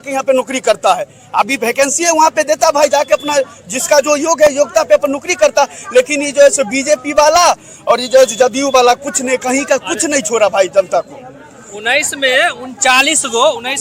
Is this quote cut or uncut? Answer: uncut